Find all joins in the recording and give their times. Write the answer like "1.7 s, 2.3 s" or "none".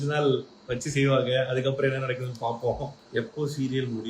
3.0 s

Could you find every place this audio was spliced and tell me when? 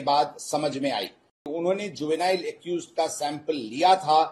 1.5 s

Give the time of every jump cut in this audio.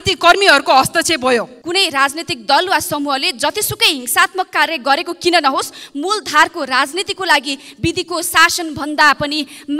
1.6 s

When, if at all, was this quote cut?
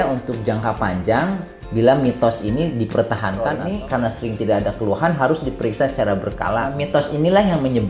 3.6 s, 6.8 s

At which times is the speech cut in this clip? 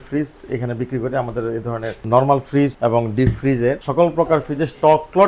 none

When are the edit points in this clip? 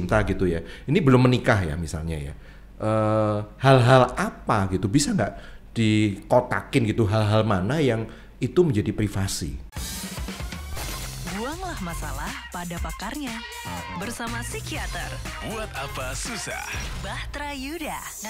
9.6 s

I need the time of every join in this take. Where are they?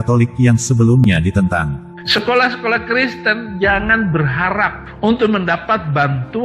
2.0 s

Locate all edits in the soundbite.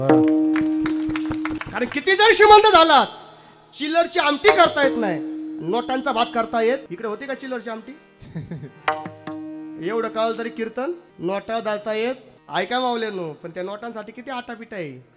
1.6 s, 6.8 s, 11.1 s, 12.3 s

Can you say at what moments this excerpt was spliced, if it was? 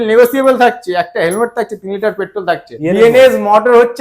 2.7 s

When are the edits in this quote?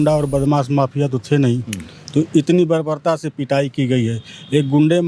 none

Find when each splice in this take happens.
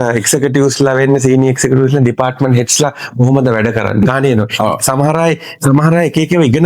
4.0 s

